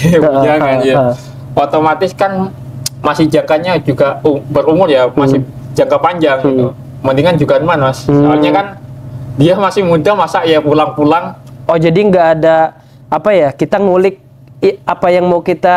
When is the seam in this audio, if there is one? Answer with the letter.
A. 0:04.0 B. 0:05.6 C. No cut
C